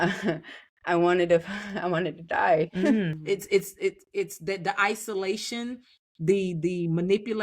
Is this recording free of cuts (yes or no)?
no